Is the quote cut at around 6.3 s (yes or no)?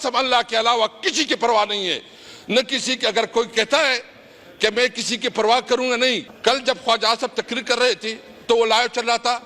yes